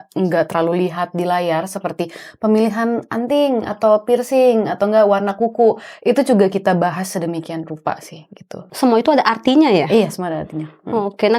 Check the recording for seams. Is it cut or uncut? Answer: uncut